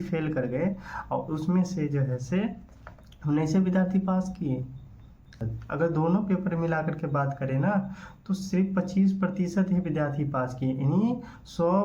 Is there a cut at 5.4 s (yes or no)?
yes